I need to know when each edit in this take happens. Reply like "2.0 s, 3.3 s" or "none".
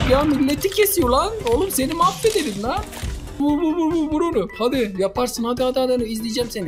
3.4 s